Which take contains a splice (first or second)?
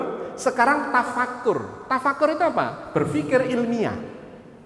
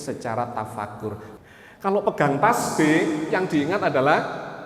second